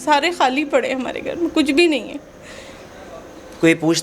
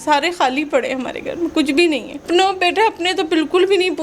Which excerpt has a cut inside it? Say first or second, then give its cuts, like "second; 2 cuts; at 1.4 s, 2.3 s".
second; 1 cut; at 2.2 s